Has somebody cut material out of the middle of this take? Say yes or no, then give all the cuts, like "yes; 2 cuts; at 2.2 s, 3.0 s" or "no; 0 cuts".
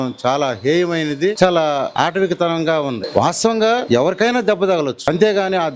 yes; 5 cuts; at 1.4 s, 1.9 s, 3.0 s, 3.8 s, 5.0 s